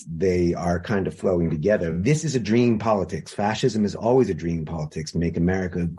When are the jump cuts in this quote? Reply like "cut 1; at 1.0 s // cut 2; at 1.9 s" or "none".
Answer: cut 1; at 1.9 s